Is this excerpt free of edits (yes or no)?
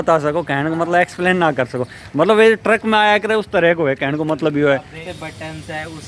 no